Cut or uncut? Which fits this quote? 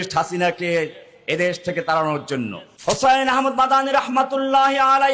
cut